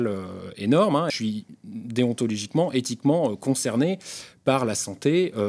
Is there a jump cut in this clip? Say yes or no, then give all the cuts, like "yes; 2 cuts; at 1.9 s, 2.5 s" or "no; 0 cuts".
yes; 1 cut; at 1.1 s